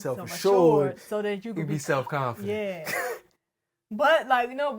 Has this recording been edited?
no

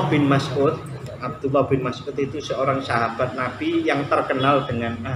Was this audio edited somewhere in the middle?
no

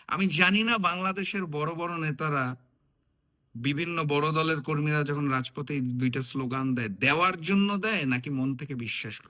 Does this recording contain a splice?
no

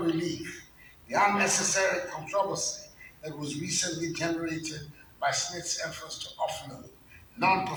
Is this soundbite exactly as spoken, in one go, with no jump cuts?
yes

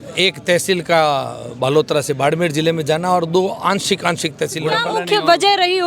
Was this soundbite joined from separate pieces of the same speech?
yes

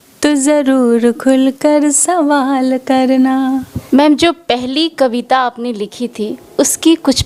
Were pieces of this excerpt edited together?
no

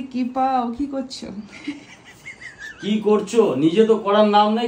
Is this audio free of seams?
yes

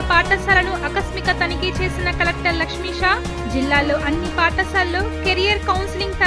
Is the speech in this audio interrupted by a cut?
no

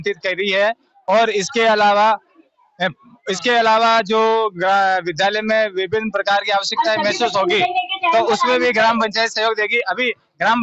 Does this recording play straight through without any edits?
yes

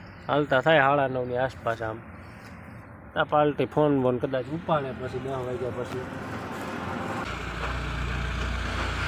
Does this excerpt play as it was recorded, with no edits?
no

